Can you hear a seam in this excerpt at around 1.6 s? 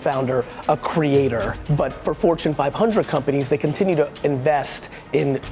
yes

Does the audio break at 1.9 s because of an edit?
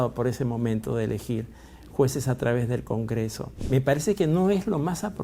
no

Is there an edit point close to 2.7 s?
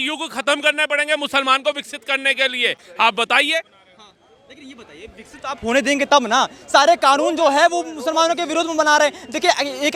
no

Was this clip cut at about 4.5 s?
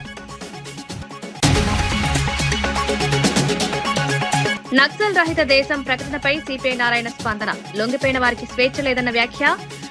yes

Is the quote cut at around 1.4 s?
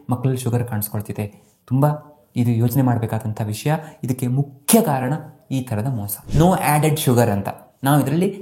no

